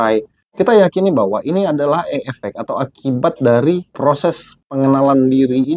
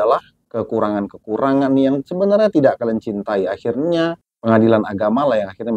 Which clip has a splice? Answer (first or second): first